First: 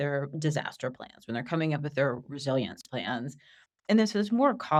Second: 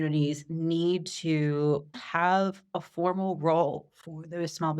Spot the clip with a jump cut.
second; 1 cut; at 1.9 s

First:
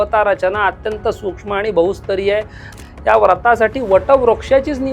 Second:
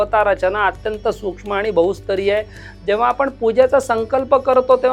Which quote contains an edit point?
first; 1 cut; at 2.8 s

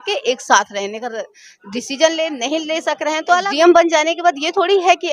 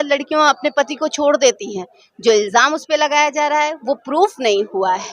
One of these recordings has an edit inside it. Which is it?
first; 1 cut; at 3.5 s

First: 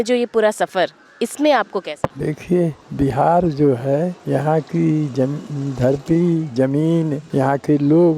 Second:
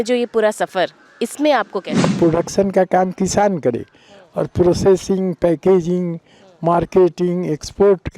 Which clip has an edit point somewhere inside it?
second; 1 cut; at 2.1 s

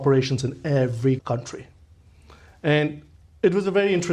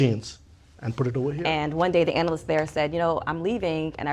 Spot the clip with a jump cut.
second; 1 cut; at 1.4 s

